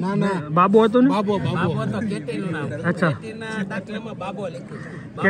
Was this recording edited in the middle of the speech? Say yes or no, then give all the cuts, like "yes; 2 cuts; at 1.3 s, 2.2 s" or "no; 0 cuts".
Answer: no; 0 cuts